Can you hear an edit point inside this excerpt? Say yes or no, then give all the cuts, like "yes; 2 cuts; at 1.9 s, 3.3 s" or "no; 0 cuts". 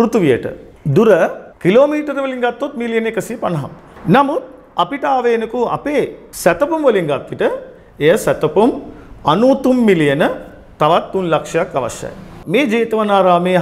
no; 0 cuts